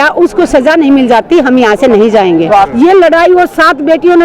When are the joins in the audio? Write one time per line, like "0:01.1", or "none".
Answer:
0:02.7

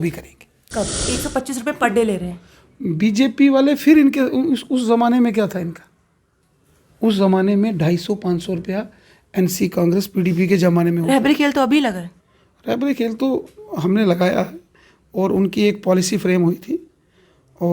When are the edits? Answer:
0:01.0

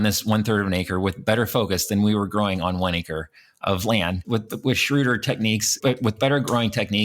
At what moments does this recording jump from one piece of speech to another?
0:05.8

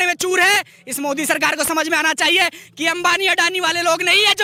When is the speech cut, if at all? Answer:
none

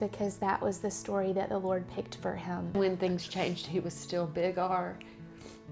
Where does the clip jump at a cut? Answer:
0:02.7

